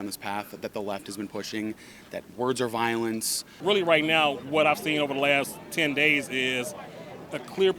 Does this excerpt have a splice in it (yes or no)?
yes